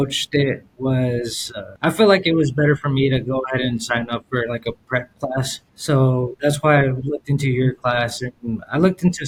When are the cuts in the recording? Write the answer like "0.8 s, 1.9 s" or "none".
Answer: none